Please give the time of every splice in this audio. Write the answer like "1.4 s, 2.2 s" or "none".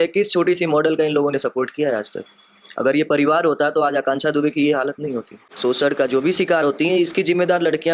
5.6 s

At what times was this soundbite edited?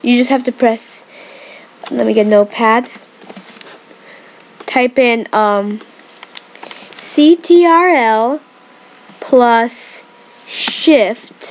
8.5 s

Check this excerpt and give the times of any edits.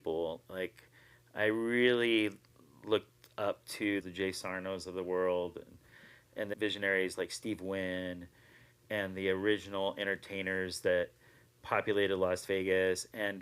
4.0 s, 6.5 s

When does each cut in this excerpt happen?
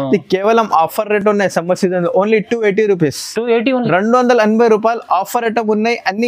none

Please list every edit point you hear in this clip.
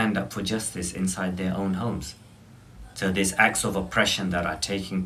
none

